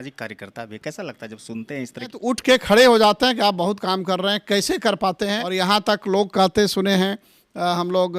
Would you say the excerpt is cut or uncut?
cut